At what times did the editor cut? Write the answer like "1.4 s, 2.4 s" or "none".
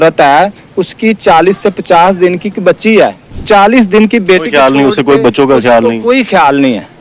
3.3 s